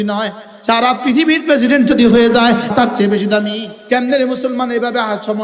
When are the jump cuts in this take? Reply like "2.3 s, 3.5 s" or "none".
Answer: 2.7 s, 3.7 s